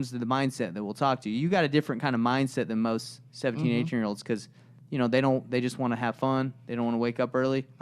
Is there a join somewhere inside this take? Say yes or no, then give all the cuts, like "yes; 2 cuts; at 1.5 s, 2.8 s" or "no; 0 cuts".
no; 0 cuts